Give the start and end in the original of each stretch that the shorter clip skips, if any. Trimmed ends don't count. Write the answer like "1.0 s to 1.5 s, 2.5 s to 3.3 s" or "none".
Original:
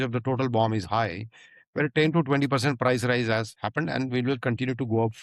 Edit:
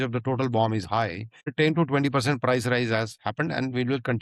1.5 s to 1.9 s